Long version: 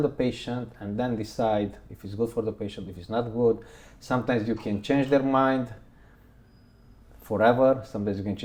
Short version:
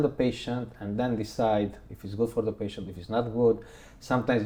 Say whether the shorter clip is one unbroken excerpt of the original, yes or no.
yes